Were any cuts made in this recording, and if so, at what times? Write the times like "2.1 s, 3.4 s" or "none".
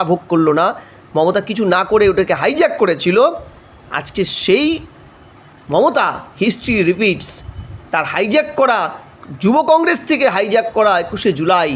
none